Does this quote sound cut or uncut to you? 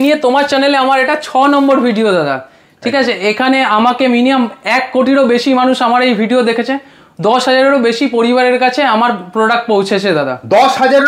uncut